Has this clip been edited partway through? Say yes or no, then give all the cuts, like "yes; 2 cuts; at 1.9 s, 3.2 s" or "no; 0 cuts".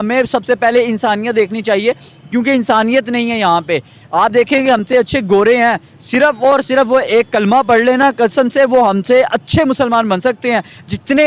no; 0 cuts